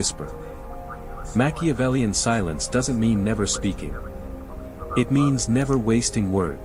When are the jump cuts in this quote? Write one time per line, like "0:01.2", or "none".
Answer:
none